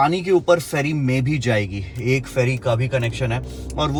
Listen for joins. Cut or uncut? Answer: uncut